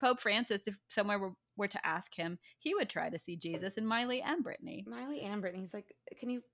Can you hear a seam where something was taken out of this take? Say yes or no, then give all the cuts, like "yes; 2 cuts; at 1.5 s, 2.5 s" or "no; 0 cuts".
no; 0 cuts